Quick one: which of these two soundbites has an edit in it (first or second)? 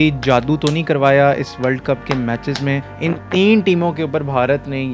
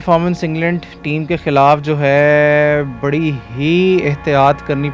first